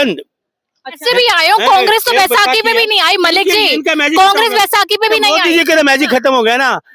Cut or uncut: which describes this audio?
cut